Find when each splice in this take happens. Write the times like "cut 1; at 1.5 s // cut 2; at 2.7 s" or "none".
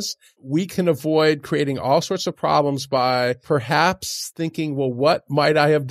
cut 1; at 3.4 s